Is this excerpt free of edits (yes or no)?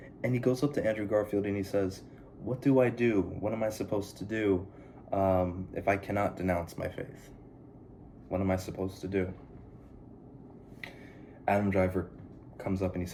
yes